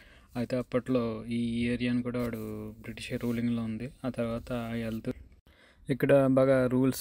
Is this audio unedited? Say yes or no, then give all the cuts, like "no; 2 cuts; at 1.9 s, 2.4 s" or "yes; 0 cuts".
no; 1 cut; at 5.1 s